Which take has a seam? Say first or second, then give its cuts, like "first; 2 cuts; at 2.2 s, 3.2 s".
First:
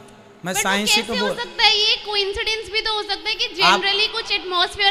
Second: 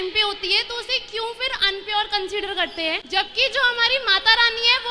second; 1 cut; at 3.0 s